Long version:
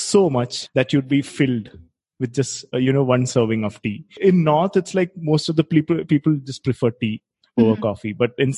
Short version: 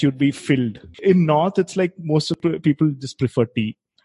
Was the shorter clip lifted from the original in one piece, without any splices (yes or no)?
no